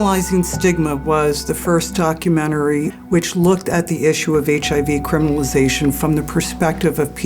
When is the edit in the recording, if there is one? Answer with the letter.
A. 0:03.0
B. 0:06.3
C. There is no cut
A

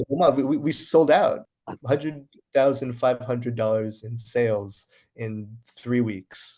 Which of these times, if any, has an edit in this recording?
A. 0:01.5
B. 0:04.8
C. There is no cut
A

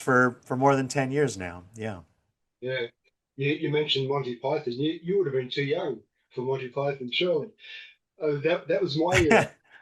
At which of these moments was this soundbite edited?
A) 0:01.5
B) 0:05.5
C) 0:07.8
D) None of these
D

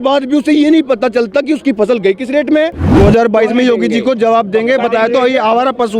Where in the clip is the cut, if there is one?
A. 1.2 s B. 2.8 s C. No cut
B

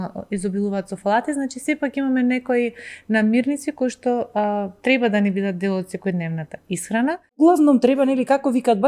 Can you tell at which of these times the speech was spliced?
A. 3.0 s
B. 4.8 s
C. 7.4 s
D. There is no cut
C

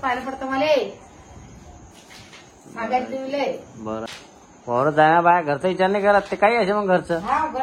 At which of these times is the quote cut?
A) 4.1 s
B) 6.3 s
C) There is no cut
A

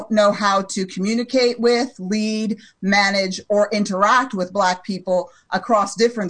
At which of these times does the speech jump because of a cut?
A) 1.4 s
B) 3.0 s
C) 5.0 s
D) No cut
D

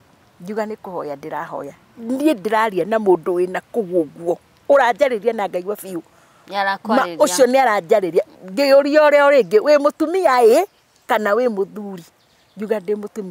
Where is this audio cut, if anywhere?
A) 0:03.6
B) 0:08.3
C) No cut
B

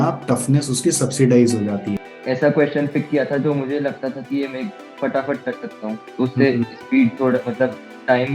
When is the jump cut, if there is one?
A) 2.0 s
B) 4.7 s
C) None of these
A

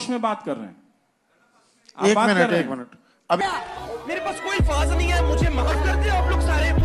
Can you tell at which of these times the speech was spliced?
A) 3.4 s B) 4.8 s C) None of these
A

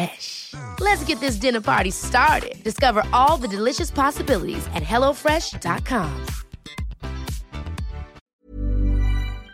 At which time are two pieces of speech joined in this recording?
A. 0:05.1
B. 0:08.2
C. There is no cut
B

